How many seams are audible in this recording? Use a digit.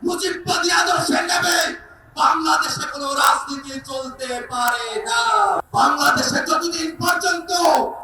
1